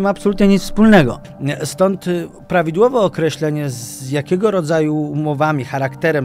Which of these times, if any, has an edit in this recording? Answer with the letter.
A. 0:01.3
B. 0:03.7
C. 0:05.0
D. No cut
A